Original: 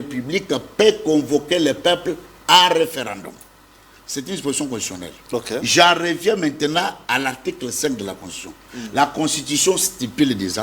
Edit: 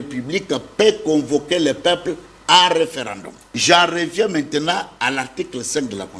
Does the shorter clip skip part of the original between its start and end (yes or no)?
yes